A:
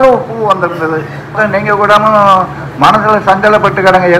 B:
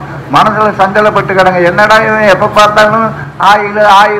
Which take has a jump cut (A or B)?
A